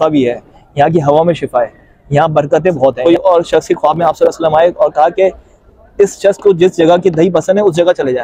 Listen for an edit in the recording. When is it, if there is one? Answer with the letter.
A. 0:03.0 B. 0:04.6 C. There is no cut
A